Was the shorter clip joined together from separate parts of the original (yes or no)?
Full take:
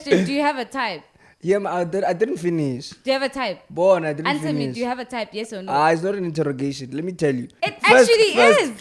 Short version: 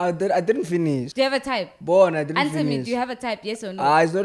yes